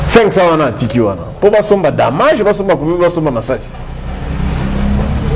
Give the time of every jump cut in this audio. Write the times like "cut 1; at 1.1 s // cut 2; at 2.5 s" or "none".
none